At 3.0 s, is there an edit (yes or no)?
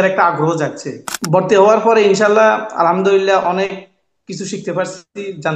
no